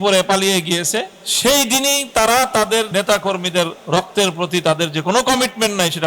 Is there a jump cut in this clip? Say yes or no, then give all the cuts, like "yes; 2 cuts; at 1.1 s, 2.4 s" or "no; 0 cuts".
yes; 3 cuts; at 1.2 s, 2.9 s, 3.8 s